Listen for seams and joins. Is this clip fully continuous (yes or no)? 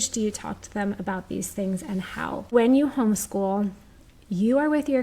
no